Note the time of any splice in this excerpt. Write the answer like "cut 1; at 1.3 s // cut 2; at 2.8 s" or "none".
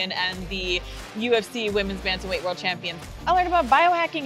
cut 1; at 2.9 s